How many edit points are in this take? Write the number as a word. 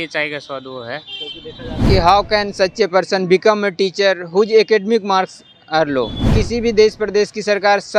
two